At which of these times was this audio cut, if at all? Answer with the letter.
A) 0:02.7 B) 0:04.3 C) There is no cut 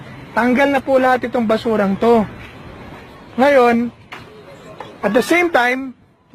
A